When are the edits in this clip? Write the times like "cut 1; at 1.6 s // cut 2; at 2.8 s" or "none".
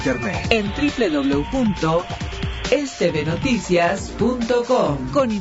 none